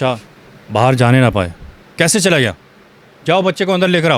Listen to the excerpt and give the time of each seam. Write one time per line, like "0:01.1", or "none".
none